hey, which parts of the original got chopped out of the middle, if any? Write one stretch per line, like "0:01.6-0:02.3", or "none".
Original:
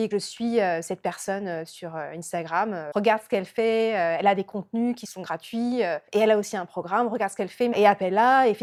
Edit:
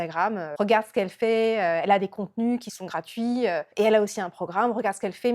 none